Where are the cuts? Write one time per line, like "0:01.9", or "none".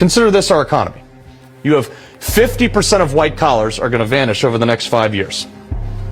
none